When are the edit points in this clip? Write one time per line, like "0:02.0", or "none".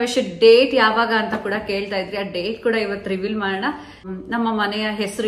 0:04.0